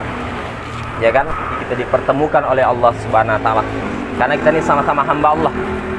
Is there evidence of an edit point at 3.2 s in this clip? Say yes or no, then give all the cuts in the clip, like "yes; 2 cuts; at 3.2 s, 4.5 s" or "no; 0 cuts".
no; 1 cut; at 1.6 s